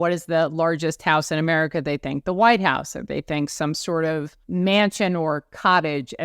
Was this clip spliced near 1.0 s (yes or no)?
no